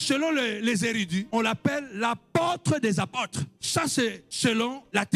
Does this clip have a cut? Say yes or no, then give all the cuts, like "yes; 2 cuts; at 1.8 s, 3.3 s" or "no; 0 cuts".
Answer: no; 0 cuts